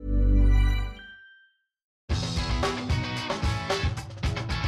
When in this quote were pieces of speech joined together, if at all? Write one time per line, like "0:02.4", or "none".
0:02.0